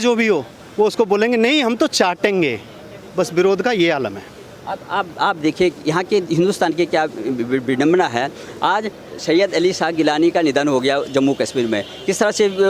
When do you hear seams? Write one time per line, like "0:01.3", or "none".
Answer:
none